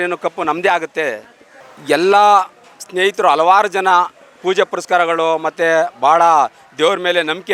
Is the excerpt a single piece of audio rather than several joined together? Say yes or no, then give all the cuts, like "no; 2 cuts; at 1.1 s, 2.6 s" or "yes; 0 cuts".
yes; 0 cuts